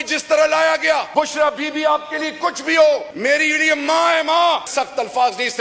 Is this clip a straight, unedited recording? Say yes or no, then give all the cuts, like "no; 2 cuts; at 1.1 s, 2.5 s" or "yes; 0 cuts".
no; 3 cuts; at 1.1 s, 3.1 s, 4.7 s